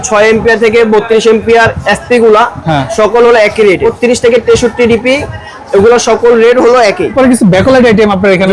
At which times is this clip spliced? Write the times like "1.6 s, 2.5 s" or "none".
3.9 s, 7.1 s